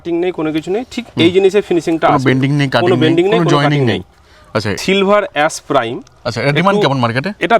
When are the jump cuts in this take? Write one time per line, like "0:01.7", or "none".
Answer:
0:04.8